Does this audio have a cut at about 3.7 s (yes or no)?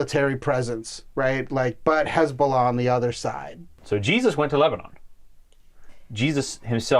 yes